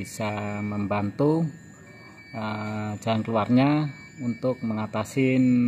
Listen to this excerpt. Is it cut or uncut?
uncut